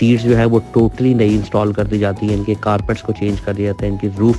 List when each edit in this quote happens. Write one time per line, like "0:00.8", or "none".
none